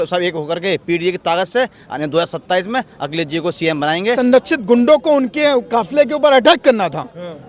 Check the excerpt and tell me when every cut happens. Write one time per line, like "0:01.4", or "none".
0:04.2